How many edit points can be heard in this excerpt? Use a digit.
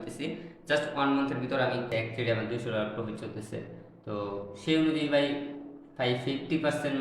1